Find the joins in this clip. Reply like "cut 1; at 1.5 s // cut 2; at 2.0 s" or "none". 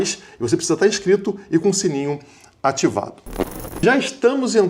cut 1; at 3.4 s